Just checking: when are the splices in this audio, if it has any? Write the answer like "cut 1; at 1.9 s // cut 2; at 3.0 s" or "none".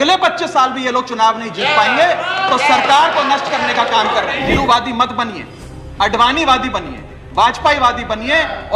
cut 1; at 4.6 s